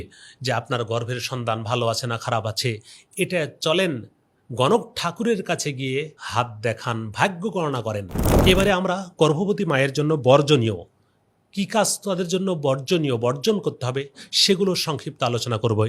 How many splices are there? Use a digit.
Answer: 2